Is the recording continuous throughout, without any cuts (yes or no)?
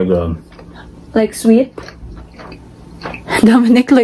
yes